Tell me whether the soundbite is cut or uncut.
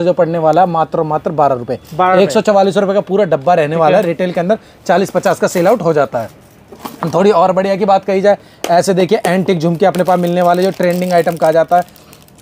uncut